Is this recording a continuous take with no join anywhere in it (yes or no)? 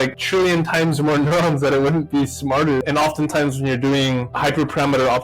no